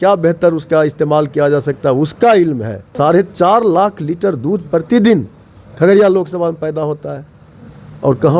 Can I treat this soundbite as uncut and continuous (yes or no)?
no